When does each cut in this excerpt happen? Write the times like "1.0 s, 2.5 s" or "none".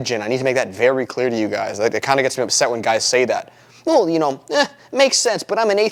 none